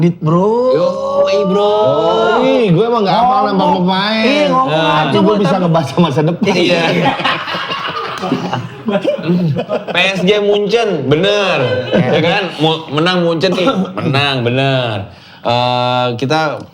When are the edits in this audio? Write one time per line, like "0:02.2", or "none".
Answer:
none